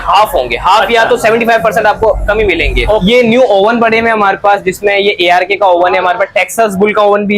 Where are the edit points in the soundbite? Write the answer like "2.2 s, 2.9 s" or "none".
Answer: 3.0 s